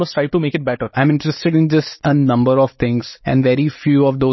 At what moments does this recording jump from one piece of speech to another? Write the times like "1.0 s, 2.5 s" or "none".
0.9 s, 1.9 s, 3.1 s